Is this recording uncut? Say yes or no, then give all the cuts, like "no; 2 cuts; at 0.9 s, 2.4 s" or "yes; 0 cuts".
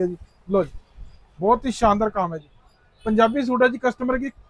yes; 0 cuts